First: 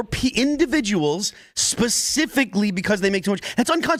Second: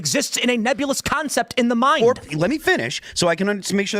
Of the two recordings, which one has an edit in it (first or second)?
second